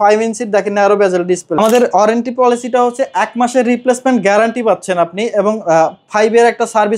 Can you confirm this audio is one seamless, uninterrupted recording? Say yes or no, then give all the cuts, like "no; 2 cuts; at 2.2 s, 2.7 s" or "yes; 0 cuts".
no; 1 cut; at 1.6 s